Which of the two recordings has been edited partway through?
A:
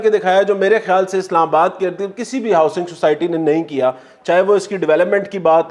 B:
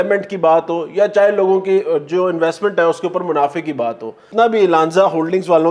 B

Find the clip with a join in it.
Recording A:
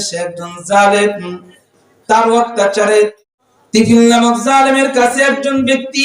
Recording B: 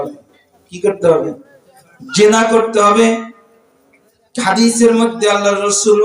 A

